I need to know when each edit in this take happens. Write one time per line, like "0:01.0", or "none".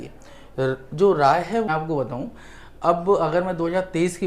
0:01.7